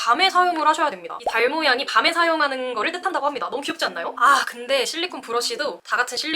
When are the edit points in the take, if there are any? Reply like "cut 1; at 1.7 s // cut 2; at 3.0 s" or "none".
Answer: cut 1; at 1.2 s // cut 2; at 4.2 s